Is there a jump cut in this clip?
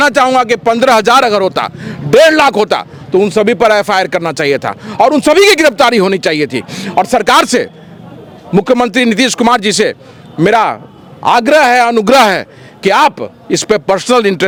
no; 0 cuts

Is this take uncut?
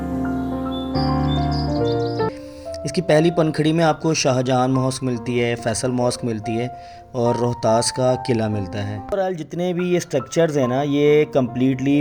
no; 2 cuts; at 2.3 s, 9.1 s

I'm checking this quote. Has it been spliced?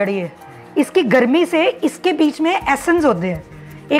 no; 0 cuts

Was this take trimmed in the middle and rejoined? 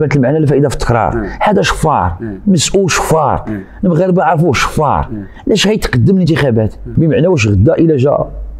yes; 1 cut; at 6.8 s

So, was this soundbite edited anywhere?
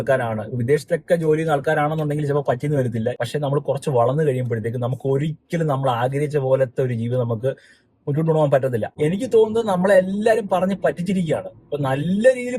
yes; 2 cuts; at 3.2 s, 8.9 s

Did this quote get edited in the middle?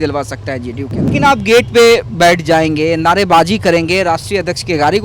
yes; 1 cut; at 1.1 s

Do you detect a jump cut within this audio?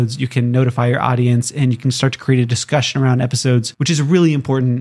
yes; 1 cut; at 3.7 s

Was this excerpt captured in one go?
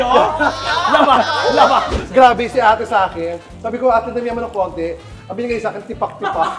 no; 1 cut; at 1.9 s

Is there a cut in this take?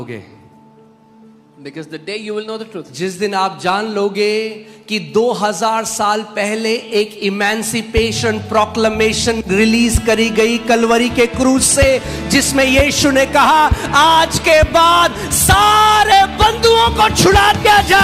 no; 0 cuts

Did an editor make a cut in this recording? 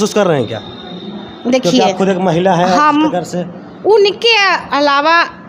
no; 0 cuts

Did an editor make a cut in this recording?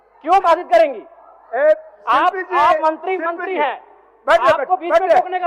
no; 0 cuts

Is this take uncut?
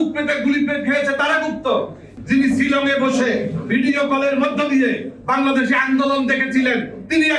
no; 1 cut; at 2.1 s

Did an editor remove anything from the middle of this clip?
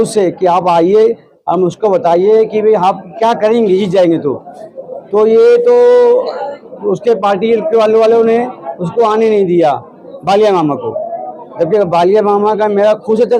no; 0 cuts

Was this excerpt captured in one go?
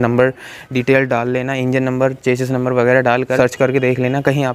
no; 1 cut; at 3.4 s

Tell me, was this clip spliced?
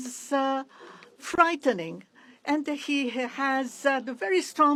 no; 0 cuts

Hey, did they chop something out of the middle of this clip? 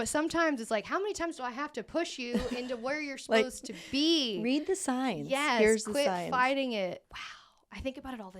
yes; 1 cut; at 7.0 s

